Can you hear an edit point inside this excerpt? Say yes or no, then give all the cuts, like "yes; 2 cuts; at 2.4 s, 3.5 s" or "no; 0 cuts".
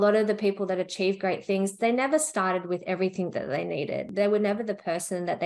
yes; 1 cut; at 4.1 s